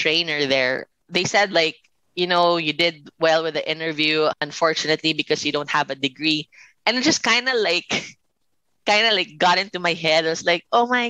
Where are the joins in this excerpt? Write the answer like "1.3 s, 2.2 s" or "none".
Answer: 1.0 s, 4.5 s